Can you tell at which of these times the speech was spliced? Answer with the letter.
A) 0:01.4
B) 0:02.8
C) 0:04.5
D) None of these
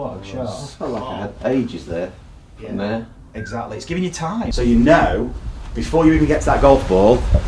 C